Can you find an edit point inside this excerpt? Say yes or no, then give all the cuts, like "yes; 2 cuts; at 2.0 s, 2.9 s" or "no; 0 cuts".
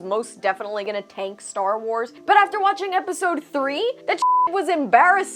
yes; 2 cuts; at 2.2 s, 4.5 s